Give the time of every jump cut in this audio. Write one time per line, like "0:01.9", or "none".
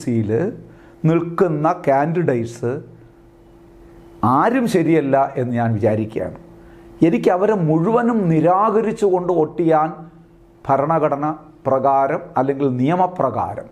none